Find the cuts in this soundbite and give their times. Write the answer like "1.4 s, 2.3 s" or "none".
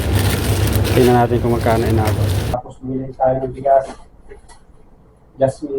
2.5 s